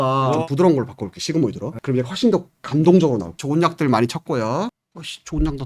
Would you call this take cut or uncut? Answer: cut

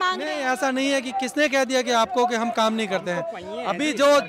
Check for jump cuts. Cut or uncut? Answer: uncut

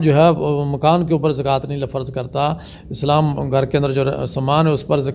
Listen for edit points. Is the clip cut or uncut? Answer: uncut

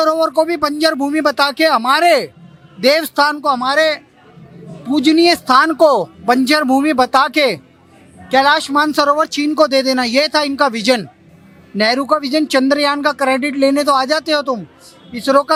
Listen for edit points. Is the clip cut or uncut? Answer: uncut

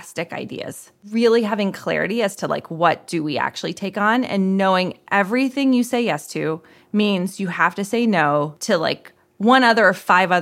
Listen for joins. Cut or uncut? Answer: cut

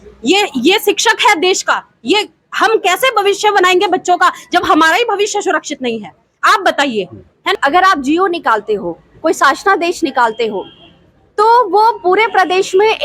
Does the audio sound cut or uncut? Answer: cut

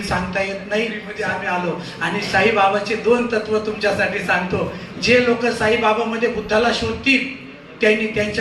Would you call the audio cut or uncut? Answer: cut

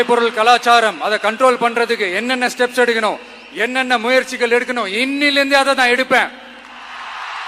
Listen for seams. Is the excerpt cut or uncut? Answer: uncut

